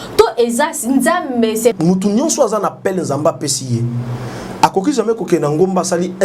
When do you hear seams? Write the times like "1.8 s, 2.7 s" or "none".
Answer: 1.7 s